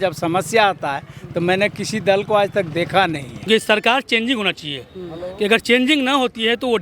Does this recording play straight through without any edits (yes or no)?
no